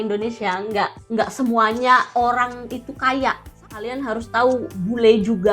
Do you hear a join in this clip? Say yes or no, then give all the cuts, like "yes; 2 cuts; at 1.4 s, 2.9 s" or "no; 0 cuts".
yes; 2 cuts; at 1.0 s, 3.5 s